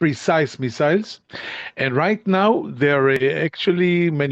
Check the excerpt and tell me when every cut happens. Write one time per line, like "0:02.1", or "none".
0:03.2